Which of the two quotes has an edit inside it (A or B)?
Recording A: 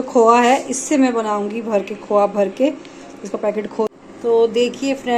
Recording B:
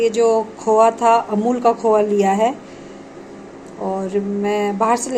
A